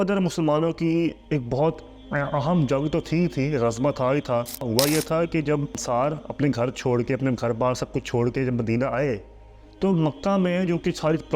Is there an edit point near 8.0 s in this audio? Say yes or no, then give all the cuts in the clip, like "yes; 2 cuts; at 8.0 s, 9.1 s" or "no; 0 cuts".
no; 3 cuts; at 1.2 s, 4.7 s, 5.8 s